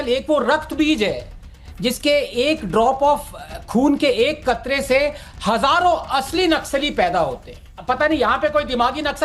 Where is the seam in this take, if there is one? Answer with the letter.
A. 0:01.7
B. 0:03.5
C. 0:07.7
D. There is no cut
C